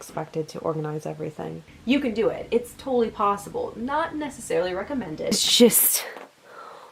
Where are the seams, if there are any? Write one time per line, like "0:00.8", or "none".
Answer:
0:01.6
0:05.3

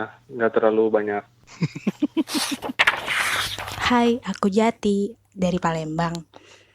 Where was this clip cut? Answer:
0:03.1

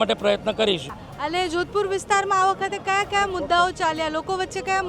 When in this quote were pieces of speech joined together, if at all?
0:01.0

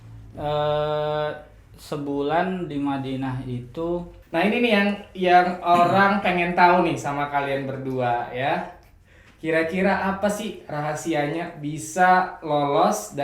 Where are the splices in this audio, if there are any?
0:04.3

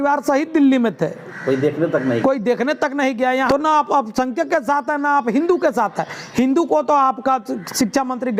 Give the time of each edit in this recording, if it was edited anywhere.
0:03.5

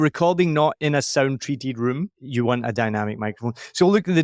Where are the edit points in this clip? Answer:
0:02.2

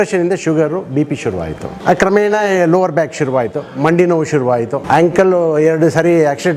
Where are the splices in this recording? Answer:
0:01.7
0:04.8

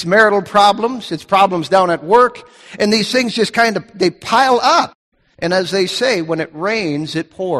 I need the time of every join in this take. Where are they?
0:05.0

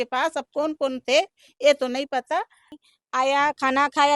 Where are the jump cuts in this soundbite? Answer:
0:02.7

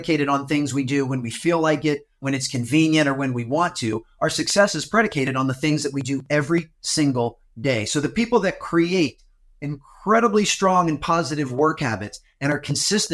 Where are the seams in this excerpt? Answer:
0:02.2
0:06.8

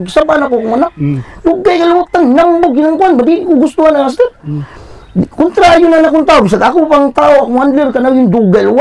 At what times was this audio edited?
none

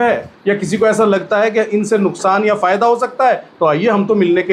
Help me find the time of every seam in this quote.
none

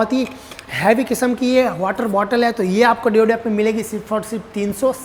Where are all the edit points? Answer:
none

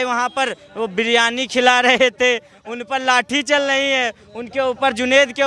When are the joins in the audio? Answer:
none

